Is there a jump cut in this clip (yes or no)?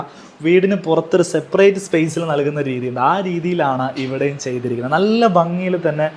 no